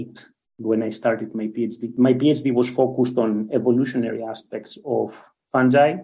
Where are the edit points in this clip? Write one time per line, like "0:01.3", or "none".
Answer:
0:01.8